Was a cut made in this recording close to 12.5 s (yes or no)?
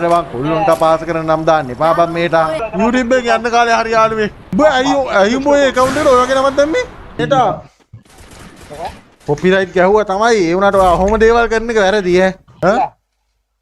yes